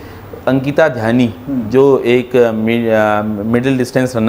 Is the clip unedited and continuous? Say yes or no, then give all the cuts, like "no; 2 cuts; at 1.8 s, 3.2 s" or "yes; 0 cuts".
yes; 0 cuts